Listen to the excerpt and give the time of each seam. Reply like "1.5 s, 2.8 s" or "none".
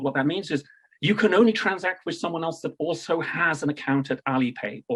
none